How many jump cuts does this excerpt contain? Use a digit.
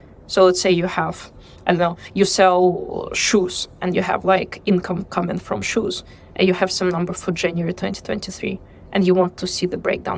0